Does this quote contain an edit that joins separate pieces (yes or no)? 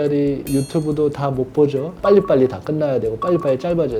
yes